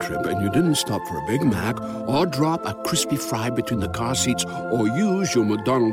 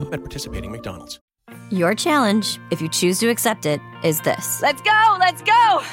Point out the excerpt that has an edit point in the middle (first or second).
second